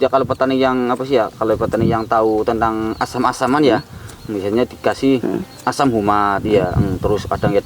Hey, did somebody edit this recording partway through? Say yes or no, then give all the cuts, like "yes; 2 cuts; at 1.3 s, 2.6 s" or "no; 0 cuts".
no; 0 cuts